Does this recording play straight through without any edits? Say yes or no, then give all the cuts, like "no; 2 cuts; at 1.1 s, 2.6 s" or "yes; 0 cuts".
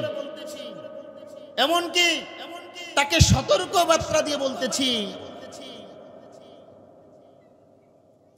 yes; 0 cuts